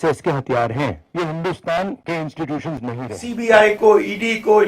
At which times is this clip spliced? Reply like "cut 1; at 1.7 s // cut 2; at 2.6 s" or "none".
cut 1; at 1.0 s // cut 2; at 2.0 s // cut 3; at 3.2 s